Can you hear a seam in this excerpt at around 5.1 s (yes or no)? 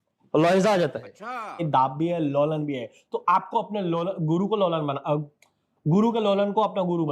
no